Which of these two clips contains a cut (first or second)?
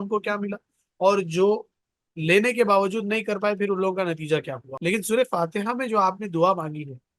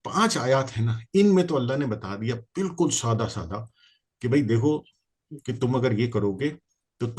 first